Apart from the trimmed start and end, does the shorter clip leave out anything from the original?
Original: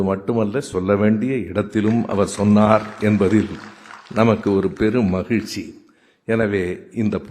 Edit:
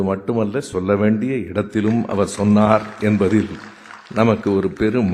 no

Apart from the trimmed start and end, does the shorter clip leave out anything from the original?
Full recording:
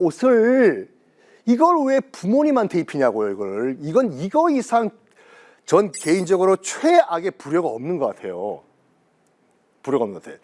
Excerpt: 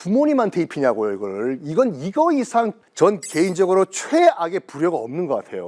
yes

